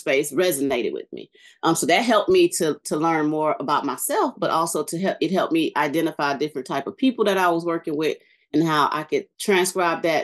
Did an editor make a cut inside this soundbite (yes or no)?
yes